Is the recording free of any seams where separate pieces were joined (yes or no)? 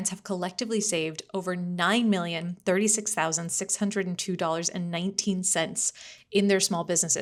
yes